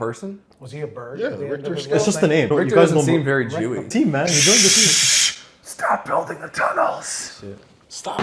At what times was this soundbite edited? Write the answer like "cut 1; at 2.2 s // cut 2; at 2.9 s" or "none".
cut 1; at 2.5 s // cut 2; at 3.9 s